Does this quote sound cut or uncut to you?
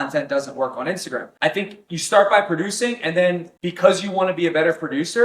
cut